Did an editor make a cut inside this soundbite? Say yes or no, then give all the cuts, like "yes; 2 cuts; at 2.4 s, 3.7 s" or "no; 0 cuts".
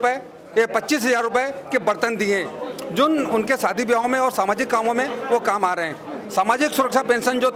no; 0 cuts